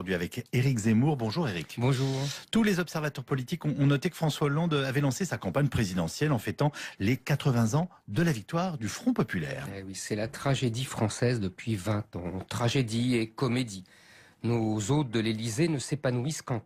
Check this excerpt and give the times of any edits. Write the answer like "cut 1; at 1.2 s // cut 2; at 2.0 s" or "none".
none